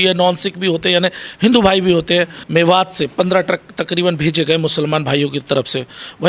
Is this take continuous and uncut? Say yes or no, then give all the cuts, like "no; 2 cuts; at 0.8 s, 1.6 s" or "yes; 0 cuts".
no; 1 cut; at 2.4 s